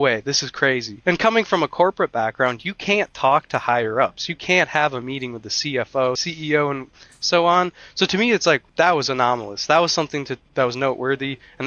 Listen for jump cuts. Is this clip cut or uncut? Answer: cut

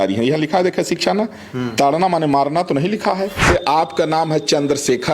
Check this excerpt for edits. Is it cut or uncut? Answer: cut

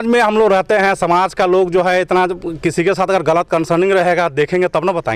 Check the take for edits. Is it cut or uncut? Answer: uncut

